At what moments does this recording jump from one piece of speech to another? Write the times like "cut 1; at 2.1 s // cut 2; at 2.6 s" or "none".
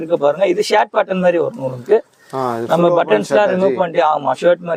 none